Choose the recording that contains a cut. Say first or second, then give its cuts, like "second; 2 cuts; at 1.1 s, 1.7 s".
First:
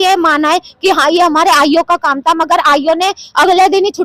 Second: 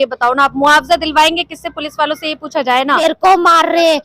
second; 1 cut; at 3.0 s